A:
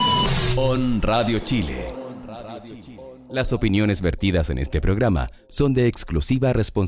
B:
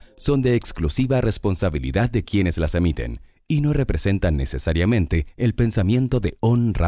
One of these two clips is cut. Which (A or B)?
A